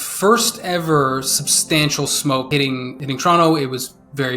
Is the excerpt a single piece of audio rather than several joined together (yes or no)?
no